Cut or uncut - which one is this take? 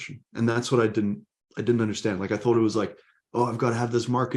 uncut